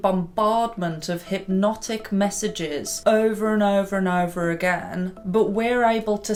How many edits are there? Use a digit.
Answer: 0